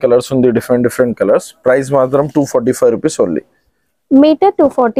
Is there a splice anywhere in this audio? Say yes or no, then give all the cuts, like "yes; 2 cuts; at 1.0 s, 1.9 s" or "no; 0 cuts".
no; 0 cuts